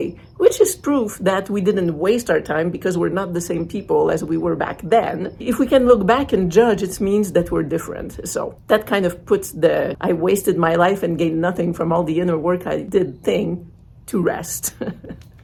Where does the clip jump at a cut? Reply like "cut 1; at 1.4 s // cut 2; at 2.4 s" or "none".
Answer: none